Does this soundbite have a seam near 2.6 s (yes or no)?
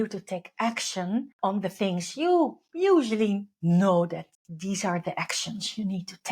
no